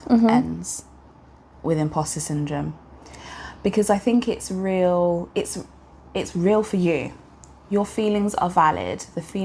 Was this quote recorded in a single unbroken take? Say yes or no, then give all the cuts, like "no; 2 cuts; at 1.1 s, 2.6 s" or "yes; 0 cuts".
yes; 0 cuts